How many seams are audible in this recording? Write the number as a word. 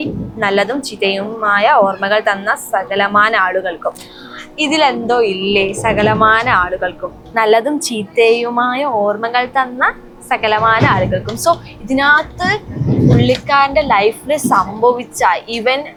zero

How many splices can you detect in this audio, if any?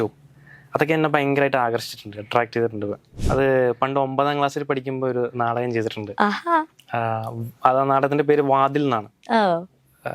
one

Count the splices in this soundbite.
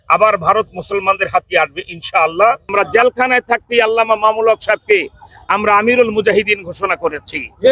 one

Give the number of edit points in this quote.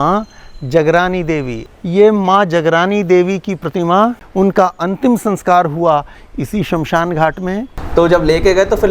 three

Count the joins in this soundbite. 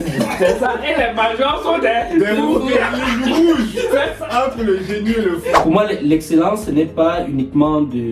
one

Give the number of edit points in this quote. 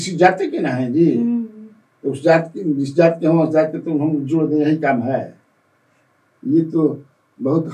zero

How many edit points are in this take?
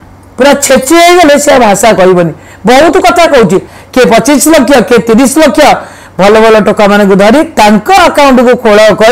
one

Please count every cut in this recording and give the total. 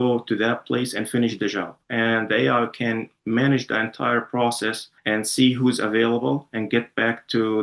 one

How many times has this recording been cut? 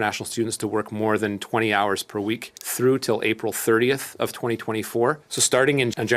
one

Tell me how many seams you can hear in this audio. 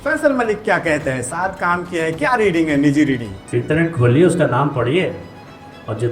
one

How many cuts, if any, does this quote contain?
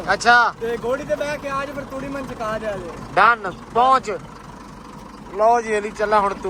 zero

